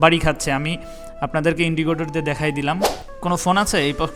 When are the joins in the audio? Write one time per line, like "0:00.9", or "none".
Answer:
0:03.0